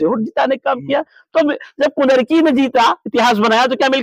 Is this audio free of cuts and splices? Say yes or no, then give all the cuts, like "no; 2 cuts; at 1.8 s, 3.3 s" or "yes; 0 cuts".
yes; 0 cuts